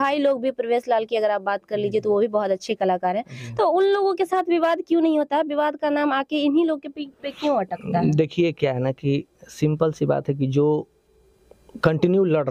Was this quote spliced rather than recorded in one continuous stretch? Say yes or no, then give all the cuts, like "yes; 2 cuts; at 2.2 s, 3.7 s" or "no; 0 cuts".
no; 0 cuts